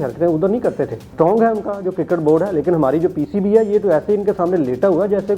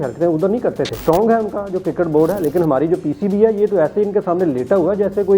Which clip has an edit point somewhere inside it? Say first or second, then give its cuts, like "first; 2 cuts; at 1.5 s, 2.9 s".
second; 1 cut; at 0.9 s